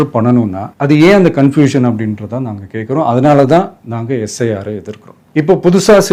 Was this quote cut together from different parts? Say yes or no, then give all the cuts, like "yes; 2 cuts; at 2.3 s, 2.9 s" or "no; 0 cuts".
no; 0 cuts